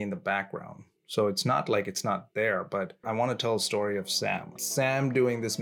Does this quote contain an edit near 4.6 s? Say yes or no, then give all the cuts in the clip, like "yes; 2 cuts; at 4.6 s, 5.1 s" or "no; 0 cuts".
yes; 2 cuts; at 3.0 s, 4.6 s